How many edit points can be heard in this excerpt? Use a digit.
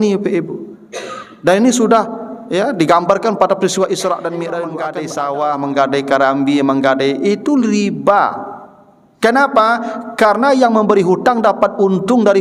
1